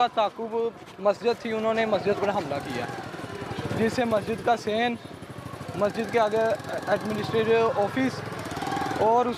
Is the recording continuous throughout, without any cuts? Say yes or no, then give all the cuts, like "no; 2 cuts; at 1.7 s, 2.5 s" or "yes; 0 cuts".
yes; 0 cuts